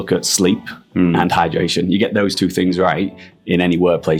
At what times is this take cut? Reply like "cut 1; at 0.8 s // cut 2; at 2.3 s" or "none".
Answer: none